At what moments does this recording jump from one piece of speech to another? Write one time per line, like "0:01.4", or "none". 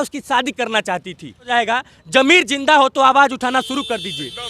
0:01.5